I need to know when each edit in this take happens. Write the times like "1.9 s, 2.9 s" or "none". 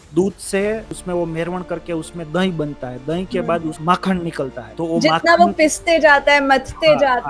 0.9 s, 3.8 s, 4.6 s

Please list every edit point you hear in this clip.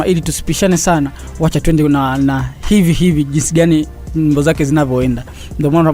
none

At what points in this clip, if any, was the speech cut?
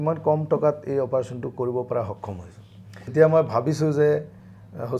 3.1 s

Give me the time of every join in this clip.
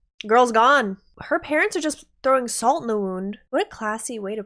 1.1 s, 3.4 s

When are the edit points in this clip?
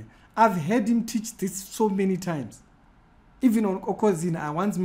none

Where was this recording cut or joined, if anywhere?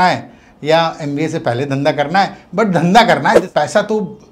3.4 s

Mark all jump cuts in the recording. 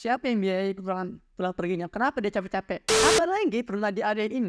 2.9 s

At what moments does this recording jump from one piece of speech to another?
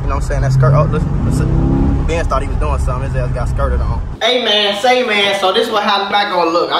4.1 s

